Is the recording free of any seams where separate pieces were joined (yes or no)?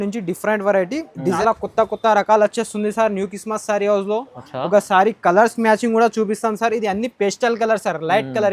no